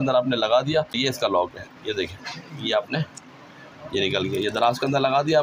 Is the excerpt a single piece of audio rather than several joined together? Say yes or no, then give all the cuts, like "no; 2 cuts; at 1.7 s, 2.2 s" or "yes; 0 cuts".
no; 1 cut; at 1.0 s